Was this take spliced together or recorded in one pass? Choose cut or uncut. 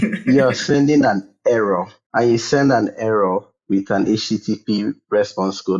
cut